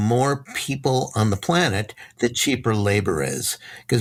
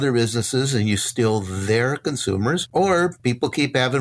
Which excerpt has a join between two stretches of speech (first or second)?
second